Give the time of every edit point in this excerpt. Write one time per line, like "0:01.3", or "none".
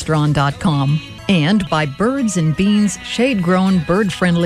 0:01.1